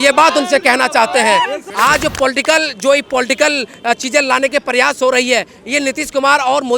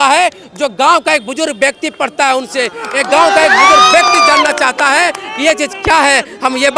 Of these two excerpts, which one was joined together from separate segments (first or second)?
first